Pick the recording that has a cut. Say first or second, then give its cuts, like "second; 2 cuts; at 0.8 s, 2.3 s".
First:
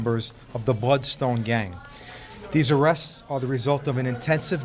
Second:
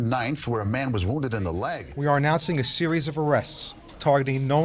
second; 1 cut; at 1.9 s